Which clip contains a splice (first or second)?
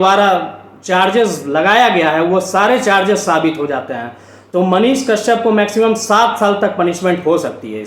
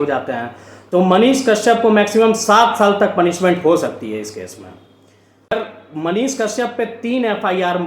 second